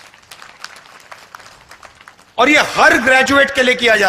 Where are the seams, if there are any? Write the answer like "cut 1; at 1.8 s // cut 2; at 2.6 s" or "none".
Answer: none